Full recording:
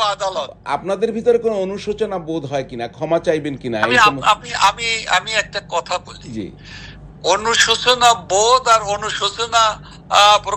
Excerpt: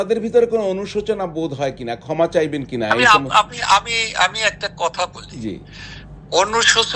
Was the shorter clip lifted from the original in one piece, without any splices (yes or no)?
yes